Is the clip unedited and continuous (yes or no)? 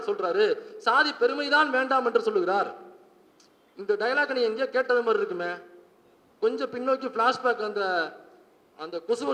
yes